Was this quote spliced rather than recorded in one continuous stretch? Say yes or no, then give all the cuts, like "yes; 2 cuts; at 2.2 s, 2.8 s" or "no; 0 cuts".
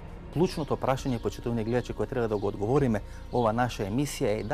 yes; 1 cut; at 2.3 s